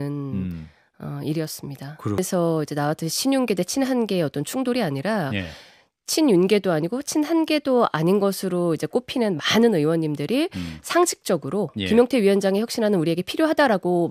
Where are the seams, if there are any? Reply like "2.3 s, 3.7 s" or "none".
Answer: 2.2 s